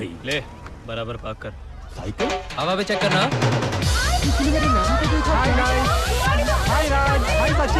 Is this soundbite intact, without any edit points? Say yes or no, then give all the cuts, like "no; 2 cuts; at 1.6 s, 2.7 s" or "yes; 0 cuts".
yes; 0 cuts